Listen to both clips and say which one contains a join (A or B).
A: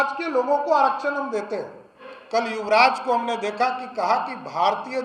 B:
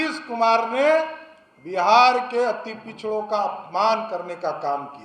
A